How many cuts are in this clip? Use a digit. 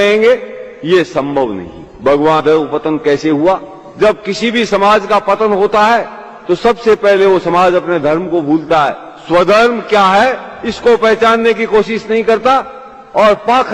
1